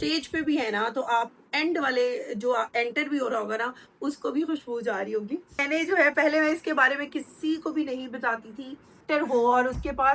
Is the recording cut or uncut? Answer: cut